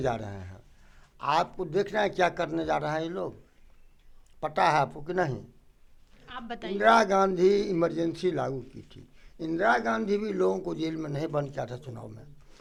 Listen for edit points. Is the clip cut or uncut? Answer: uncut